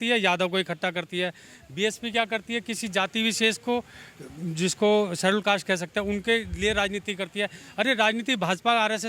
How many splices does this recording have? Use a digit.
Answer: 0